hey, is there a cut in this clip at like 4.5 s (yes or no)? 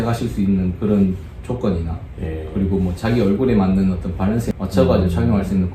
yes